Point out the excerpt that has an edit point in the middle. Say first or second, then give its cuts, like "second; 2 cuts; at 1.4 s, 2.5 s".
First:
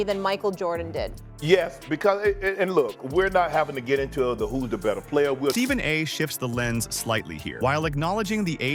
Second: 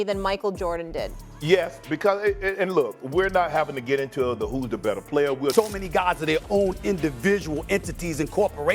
second; 1 cut; at 5.5 s